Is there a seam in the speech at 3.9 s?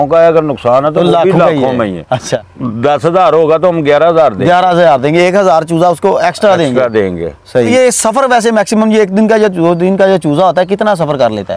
no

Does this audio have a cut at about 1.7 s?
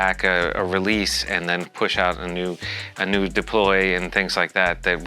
no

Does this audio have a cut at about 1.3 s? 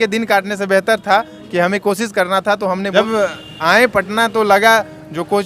no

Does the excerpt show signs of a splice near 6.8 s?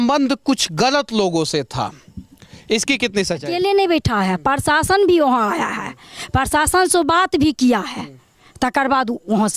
no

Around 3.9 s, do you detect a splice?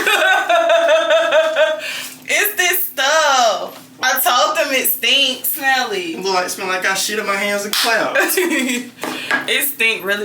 yes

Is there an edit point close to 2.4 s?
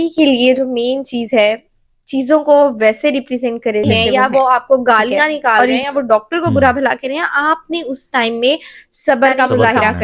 no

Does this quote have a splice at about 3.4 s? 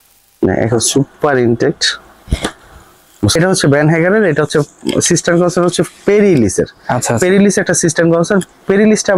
yes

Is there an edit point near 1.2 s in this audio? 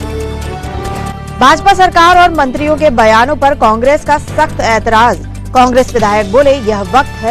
yes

